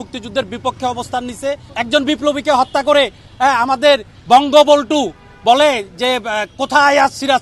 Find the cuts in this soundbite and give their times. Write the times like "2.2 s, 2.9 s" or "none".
1.7 s